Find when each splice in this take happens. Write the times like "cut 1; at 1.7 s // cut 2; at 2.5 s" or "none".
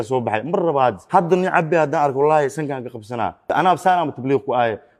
cut 1; at 3.5 s